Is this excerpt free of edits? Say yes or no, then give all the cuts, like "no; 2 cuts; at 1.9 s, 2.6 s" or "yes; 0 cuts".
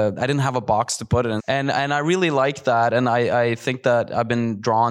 no; 1 cut; at 1.4 s